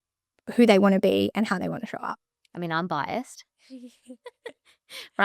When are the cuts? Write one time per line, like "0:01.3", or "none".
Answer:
none